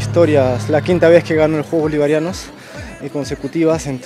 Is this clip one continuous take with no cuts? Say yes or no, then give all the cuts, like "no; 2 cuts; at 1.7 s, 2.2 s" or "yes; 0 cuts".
yes; 0 cuts